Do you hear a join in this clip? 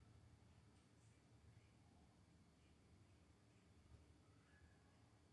yes; 1 cut; at 1.6 s

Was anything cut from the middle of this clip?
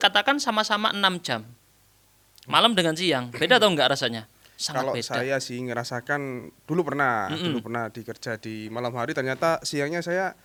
no; 0 cuts

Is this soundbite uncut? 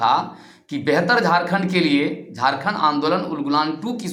yes; 0 cuts

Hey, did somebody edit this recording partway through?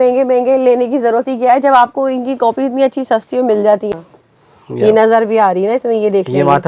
yes; 1 cut; at 3.9 s

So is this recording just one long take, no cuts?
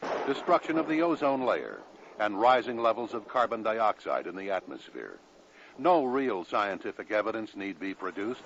yes; 0 cuts

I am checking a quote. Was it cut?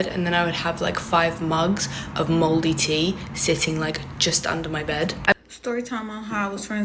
yes; 1 cut; at 5.3 s

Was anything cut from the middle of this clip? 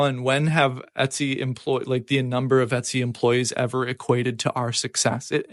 no; 0 cuts

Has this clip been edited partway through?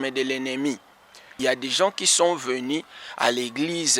yes; 1 cut; at 1.3 s

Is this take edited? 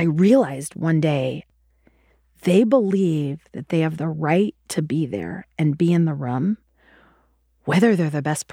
yes; 1 cut; at 1.5 s

